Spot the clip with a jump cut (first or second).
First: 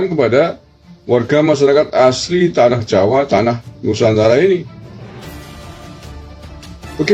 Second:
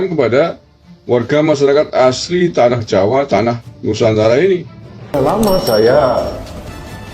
second